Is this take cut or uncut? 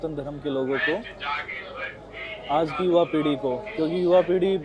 uncut